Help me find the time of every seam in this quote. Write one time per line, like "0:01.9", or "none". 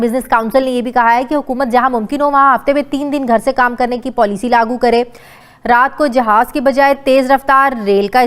0:05.3